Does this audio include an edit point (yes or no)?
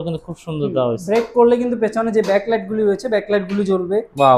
no